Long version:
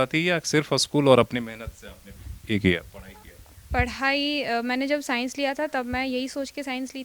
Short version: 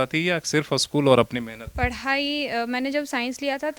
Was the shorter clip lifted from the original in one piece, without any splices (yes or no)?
no